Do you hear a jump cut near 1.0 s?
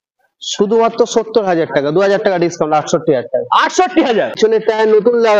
no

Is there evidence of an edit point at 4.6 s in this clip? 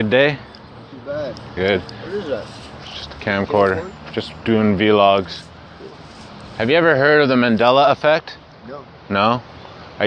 yes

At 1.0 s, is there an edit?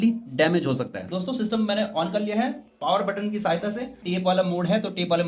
yes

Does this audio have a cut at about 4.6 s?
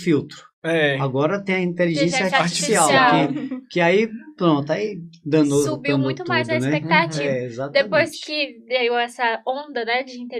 no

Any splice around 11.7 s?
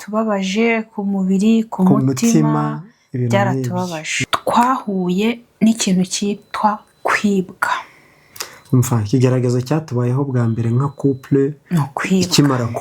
no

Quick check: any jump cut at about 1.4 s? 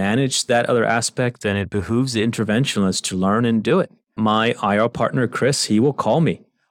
no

